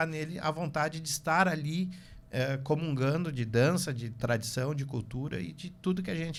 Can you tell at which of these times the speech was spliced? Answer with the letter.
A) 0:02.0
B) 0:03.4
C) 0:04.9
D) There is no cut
D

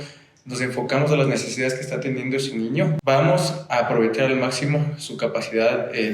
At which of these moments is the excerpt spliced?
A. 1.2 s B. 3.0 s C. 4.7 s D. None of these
B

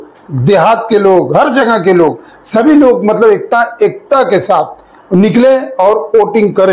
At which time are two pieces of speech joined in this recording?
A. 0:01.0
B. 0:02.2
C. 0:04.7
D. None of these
D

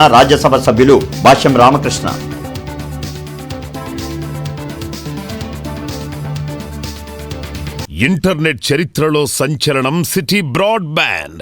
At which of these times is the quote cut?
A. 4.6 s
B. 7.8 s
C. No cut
B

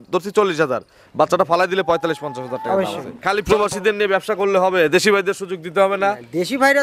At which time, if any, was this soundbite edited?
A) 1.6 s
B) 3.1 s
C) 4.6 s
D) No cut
B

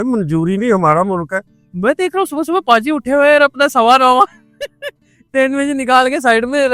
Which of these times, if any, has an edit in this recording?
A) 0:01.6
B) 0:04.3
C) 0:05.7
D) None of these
A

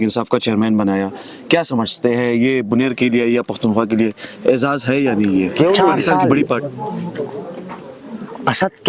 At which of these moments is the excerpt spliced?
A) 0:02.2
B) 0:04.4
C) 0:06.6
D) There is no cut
C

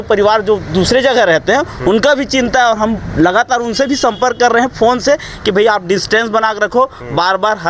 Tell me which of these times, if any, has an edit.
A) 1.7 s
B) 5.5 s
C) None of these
B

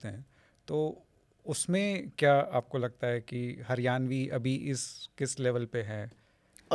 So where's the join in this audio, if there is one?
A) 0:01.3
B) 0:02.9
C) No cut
C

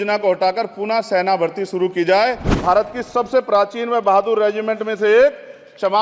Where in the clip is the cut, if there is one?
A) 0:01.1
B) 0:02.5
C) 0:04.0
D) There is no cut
B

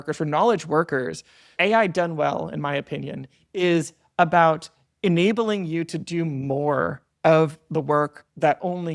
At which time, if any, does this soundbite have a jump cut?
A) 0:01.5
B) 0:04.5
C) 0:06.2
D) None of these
A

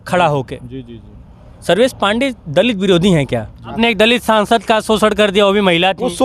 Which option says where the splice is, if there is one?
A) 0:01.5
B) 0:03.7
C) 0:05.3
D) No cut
B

